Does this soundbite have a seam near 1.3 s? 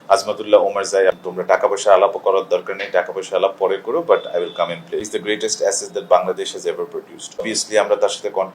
yes; 3 cuts; at 1.3 s, 5.1 s, 7.4 s

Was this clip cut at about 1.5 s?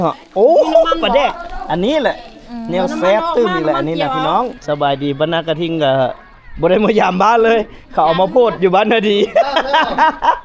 no; 1 cut; at 4.6 s

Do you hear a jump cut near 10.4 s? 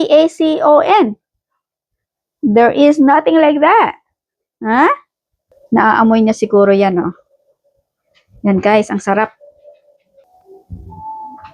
no; 0 cuts

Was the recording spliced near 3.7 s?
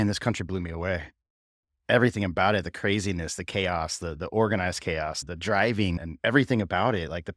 no; 2 cuts; at 5.2 s, 6.0 s

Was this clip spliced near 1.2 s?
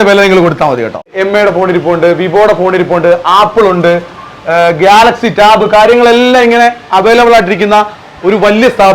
yes; 1 cut; at 1.2 s

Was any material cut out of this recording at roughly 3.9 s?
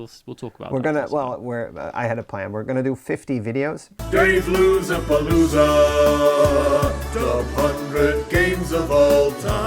yes; 1 cut; at 3.9 s

